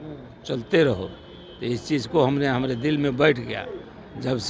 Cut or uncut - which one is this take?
uncut